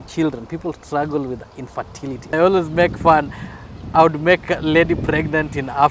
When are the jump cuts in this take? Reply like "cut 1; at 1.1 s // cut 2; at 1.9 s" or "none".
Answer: cut 1; at 2.3 s